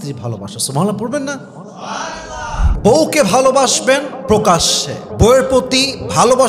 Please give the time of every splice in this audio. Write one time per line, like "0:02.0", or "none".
0:02.6